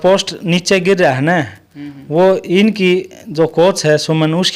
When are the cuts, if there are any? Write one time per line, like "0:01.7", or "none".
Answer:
none